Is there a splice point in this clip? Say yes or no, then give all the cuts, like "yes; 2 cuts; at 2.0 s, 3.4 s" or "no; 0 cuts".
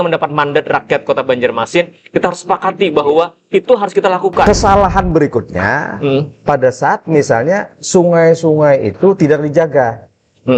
yes; 1 cut; at 4.5 s